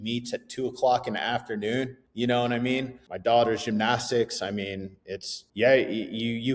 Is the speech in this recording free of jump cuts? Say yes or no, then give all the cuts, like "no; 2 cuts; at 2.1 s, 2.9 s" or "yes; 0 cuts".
no; 3 cuts; at 2.0 s, 3.0 s, 5.4 s